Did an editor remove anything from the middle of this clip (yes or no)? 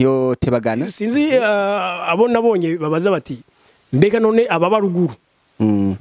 yes